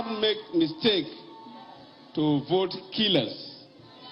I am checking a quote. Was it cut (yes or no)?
no